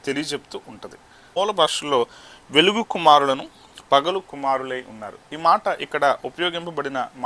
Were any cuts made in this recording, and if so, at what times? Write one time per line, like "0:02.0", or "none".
0:01.2